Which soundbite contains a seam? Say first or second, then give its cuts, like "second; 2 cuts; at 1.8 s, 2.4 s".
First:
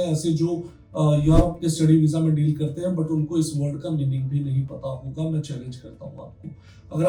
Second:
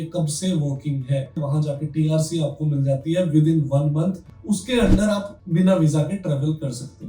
second; 3 cuts; at 1.4 s, 4.3 s, 5.4 s